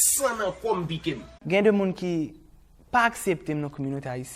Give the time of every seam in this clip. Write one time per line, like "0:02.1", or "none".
0:01.4